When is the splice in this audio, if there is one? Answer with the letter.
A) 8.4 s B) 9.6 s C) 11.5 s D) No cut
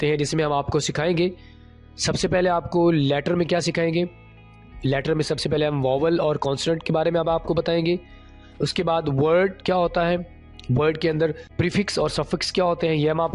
C